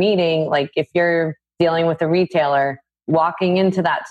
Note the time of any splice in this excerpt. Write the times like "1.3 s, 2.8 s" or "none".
1.4 s, 2.9 s